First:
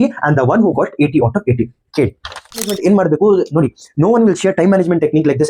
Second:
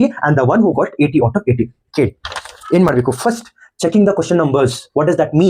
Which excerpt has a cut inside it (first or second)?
first